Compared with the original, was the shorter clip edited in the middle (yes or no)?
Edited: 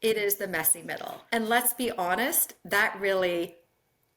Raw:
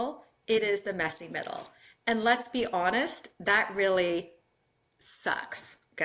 yes